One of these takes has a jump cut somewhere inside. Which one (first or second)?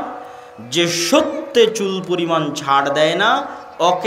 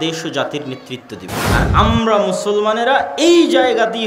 second